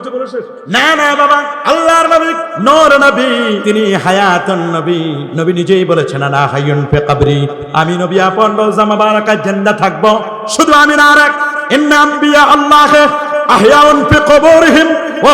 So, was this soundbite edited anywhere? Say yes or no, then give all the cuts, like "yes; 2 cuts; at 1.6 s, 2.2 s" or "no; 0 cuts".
yes; 4 cuts; at 1.5 s, 2.5 s, 3.6 s, 5.3 s